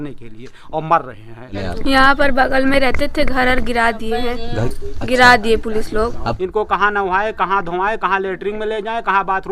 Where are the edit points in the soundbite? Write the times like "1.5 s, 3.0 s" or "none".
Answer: 1.6 s, 6.4 s